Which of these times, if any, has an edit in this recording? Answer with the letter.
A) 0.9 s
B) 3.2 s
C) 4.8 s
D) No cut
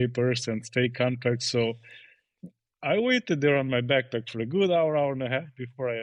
D